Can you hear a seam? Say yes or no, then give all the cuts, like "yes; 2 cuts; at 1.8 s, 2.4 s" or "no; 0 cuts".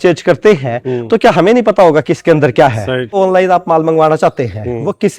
yes; 1 cut; at 3.2 s